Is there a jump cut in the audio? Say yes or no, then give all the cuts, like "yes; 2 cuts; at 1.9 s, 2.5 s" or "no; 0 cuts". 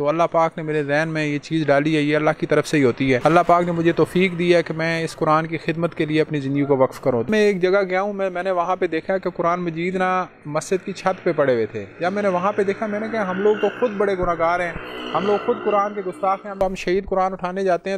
yes; 3 cuts; at 3.2 s, 7.3 s, 16.6 s